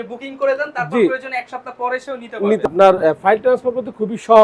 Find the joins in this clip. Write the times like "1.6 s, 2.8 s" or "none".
2.7 s